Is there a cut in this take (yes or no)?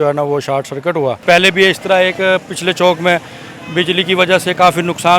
yes